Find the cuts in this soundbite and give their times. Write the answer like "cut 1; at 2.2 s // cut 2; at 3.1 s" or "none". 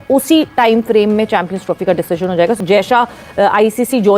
cut 1; at 2.6 s